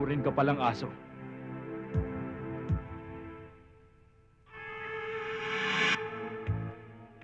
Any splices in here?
no; 0 cuts

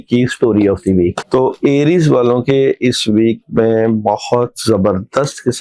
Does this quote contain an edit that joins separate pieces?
yes; 1 cut; at 1.2 s

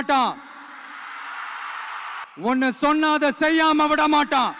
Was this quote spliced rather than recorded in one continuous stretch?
yes; 1 cut; at 2.2 s

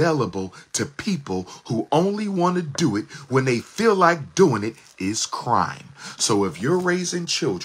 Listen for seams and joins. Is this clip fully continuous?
yes; 0 cuts

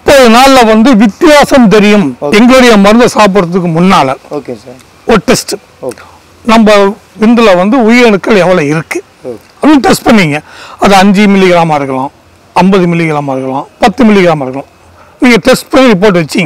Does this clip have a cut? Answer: yes; 1 cut; at 2.2 s

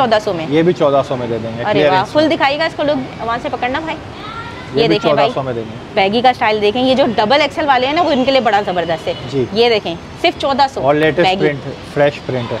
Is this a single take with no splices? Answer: yes; 0 cuts

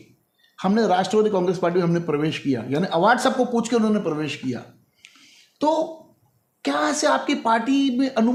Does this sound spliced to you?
no; 0 cuts

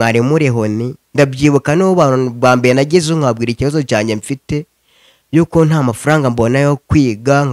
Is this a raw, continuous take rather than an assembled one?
yes; 0 cuts

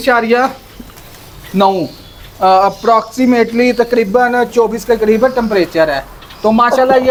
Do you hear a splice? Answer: no; 0 cuts

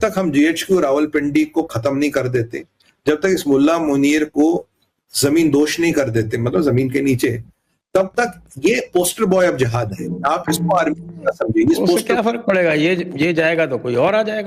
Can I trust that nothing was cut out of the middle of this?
yes; 0 cuts

